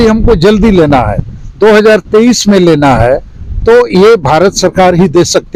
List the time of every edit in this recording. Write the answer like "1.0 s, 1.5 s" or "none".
none